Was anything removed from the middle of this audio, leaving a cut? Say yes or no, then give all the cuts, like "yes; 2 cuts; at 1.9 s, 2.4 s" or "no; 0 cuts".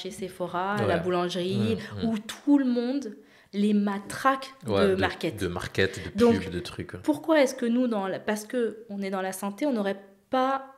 no; 0 cuts